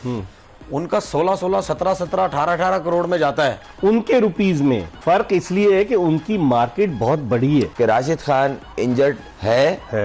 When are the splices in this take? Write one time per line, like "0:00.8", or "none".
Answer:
0:04.9
0:07.7